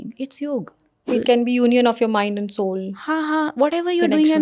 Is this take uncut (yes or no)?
no